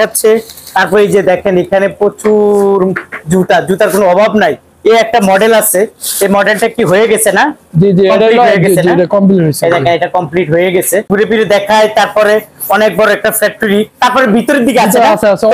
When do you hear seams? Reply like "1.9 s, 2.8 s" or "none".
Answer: 11.1 s